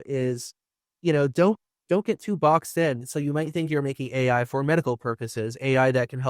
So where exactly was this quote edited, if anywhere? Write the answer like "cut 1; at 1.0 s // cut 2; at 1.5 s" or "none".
cut 1; at 3.0 s